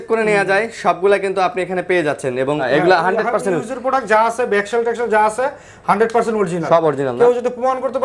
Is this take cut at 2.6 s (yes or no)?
yes